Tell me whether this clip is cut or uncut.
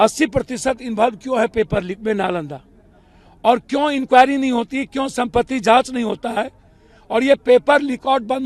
uncut